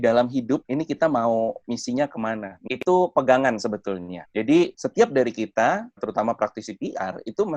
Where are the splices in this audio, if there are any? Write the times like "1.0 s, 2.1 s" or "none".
2.6 s, 4.8 s, 6.0 s